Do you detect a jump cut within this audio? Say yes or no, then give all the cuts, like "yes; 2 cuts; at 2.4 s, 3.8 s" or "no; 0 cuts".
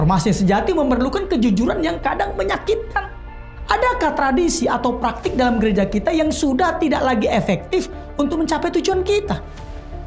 yes; 1 cut; at 3.5 s